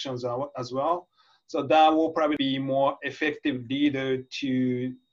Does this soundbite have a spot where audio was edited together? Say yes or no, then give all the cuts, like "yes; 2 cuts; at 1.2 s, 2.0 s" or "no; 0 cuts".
yes; 1 cut; at 2.4 s